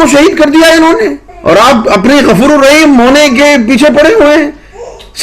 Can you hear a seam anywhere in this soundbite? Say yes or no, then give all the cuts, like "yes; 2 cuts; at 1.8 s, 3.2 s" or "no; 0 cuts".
yes; 1 cut; at 1.3 s